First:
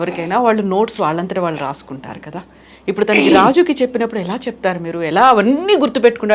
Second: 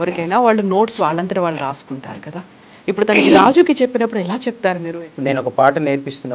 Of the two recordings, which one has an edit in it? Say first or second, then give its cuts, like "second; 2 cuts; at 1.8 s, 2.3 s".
second; 1 cut; at 4.9 s